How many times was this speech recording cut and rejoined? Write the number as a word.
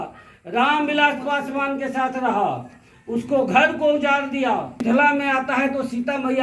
one